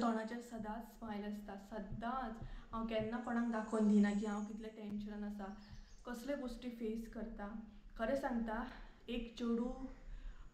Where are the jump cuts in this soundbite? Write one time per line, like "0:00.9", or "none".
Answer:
none